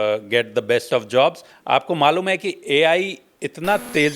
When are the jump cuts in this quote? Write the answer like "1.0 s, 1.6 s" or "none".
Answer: 1.5 s